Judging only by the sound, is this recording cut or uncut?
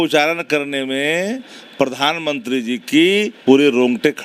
cut